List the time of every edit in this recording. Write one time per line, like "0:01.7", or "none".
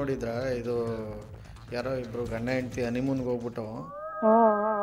none